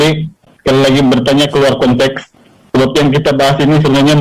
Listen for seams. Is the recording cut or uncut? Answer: uncut